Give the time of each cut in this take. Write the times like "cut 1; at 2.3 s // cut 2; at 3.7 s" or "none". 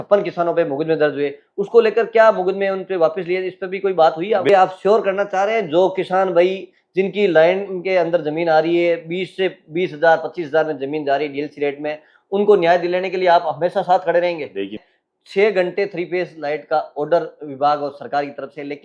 cut 1; at 4.5 s // cut 2; at 14.8 s

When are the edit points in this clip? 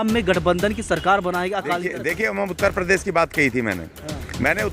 cut 1; at 2.0 s

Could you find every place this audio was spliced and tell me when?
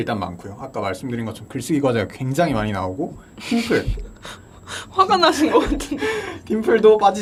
none

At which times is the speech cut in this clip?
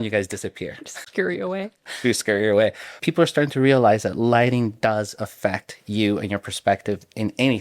cut 1; at 2.9 s

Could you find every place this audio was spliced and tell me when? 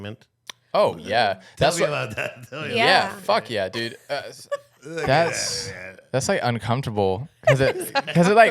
cut 1; at 4.3 s

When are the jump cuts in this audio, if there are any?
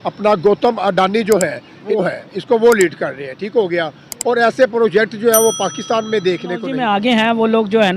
cut 1; at 2.0 s // cut 2; at 6.7 s

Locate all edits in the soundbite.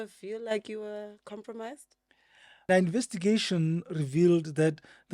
cut 1; at 2.7 s

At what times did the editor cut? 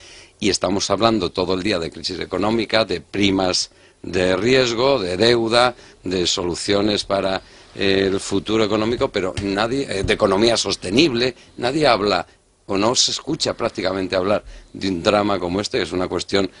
cut 1; at 3.7 s

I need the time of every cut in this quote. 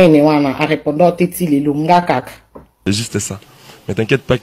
cut 1; at 2.7 s

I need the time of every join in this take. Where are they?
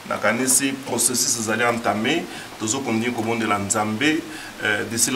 none

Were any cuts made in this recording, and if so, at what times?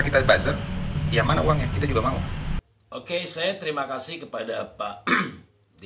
cut 1; at 2.6 s

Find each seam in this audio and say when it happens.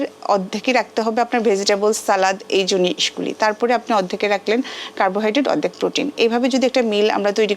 none

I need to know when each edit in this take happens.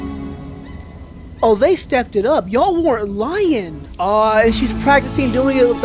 cut 1; at 3.8 s

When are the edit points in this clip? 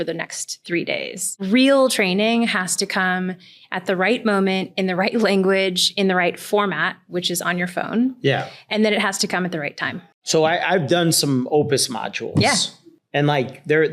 cut 1; at 1.3 s

